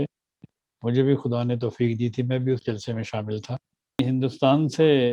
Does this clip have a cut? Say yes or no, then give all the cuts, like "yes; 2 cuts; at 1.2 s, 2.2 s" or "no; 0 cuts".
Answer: yes; 1 cut; at 4.0 s